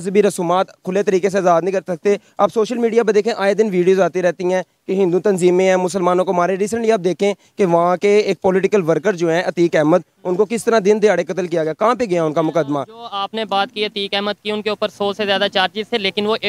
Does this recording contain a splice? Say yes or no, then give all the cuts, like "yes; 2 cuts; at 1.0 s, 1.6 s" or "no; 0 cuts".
no; 0 cuts